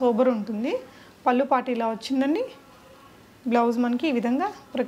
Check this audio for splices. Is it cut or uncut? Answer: uncut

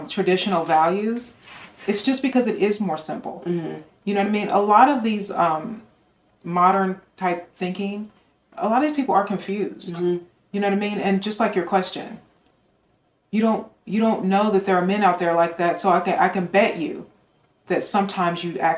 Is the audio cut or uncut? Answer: uncut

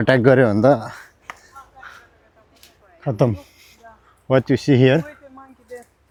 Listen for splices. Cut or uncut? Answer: uncut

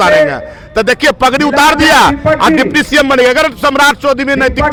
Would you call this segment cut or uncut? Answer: uncut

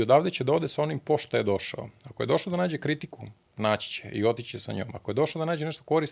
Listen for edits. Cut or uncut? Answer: uncut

